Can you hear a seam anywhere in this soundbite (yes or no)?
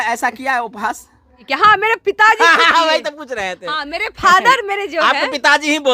yes